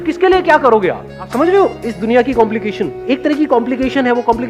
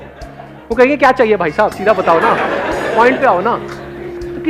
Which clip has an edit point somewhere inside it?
first; 2 cuts; at 1.3 s, 3.0 s

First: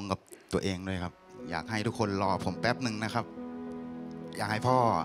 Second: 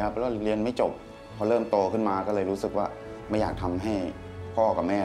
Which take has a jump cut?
second; 1 cut; at 1.1 s

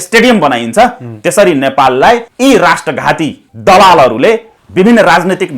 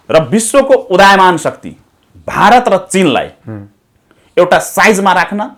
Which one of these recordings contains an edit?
first; 3 cuts; at 2.3 s, 3.5 s, 4.6 s

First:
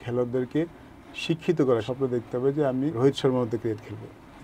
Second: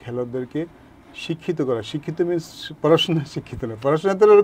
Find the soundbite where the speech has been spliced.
first; 2 cuts; at 1.9 s, 2.9 s

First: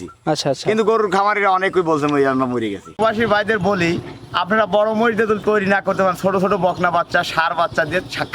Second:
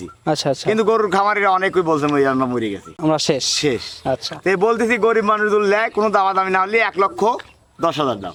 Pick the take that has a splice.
first; 1 cut; at 3.0 s

